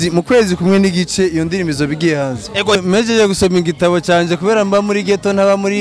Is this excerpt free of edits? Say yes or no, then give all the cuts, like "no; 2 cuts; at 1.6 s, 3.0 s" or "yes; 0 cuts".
no; 1 cut; at 2.8 s